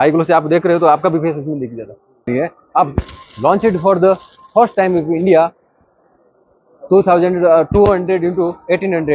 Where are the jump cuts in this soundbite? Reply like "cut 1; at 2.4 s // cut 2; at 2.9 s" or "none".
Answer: cut 1; at 2.3 s